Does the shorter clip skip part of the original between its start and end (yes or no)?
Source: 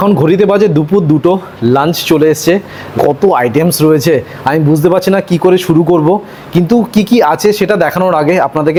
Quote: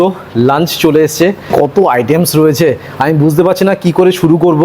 yes